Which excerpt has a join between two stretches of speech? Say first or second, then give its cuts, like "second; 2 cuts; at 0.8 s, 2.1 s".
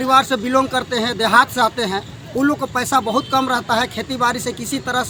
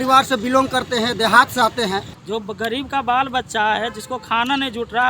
second; 1 cut; at 2.1 s